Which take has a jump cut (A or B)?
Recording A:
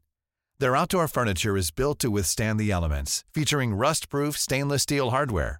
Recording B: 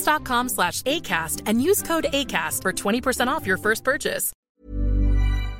B